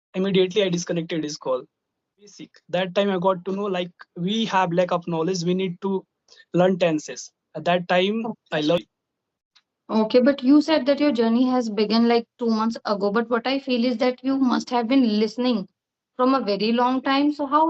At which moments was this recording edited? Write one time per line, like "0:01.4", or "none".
0:02.4
0:08.8